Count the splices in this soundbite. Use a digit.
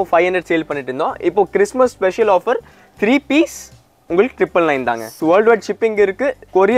1